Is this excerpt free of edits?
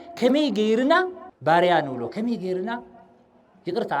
no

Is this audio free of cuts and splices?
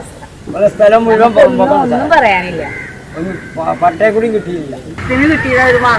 no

